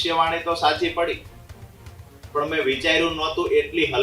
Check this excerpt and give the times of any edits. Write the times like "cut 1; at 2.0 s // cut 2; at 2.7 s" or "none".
none